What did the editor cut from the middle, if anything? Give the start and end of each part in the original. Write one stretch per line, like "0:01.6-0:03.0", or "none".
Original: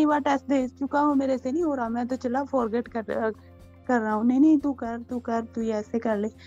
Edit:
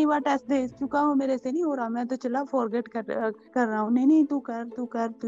0:03.4-0:03.8